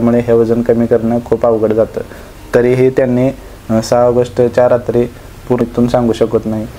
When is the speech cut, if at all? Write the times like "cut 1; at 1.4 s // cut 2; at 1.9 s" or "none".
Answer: cut 1; at 5.6 s